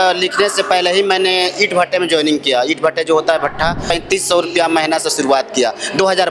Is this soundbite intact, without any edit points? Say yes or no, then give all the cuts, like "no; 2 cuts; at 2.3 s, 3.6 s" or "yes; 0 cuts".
no; 1 cut; at 3.8 s